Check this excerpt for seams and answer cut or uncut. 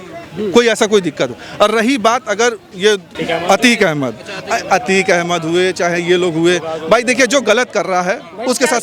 cut